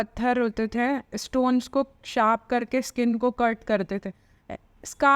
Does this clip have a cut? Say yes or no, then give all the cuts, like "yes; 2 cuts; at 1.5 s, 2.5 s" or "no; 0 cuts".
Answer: no; 0 cuts